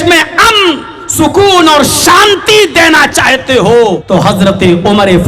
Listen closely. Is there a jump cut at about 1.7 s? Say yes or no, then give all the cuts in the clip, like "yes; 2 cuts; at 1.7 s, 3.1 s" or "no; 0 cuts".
no; 1 cut; at 4.0 s